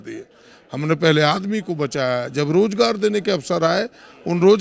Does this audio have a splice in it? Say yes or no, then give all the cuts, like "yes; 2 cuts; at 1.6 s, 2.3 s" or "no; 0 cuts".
no; 0 cuts